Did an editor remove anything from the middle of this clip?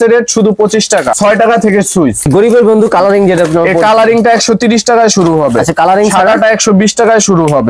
yes; 2 cuts; at 1.1 s, 2.2 s

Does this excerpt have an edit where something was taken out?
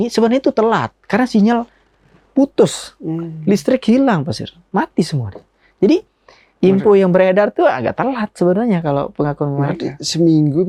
no; 0 cuts

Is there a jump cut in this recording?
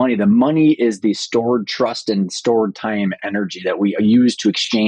no; 0 cuts

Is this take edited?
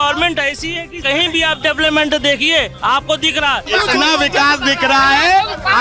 yes; 3 cuts; at 1.0 s, 2.7 s, 3.7 s

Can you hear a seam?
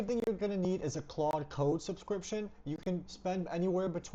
no; 0 cuts

